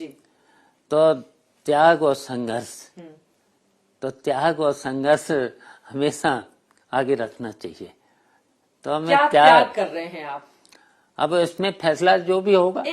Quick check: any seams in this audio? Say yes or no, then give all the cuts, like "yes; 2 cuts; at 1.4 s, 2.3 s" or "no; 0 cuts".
no; 0 cuts